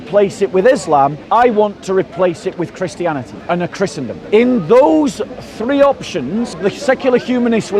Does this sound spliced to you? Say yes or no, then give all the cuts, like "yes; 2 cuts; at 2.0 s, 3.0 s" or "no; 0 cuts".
yes; 4 cuts; at 1.2 s, 3.3 s, 4.2 s, 6.6 s